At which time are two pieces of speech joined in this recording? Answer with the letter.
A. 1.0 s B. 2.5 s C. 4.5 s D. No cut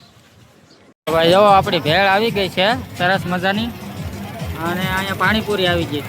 A